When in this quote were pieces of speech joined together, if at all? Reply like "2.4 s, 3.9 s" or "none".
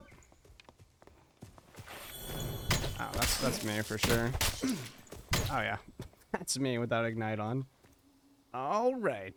none